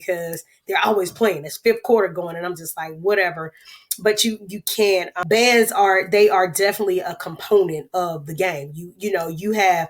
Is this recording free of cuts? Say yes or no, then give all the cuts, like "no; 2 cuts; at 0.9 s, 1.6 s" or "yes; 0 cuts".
no; 1 cut; at 5.1 s